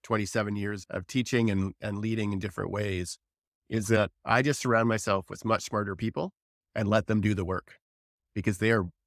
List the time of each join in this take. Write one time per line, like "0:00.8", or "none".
0:01.2